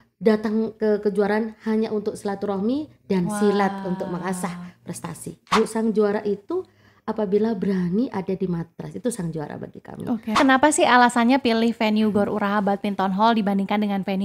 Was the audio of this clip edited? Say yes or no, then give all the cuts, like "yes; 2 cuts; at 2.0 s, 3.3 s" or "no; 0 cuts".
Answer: yes; 2 cuts; at 5.4 s, 10.4 s